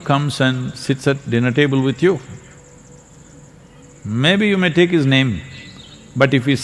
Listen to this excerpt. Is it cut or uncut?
uncut